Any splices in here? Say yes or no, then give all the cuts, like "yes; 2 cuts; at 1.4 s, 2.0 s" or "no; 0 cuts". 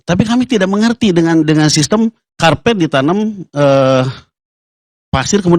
no; 0 cuts